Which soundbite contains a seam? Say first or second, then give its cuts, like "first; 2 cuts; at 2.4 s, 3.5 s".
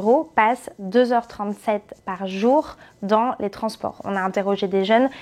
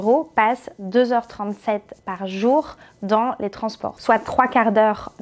second; 1 cut; at 4.0 s